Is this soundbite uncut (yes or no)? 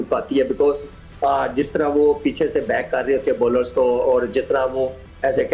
yes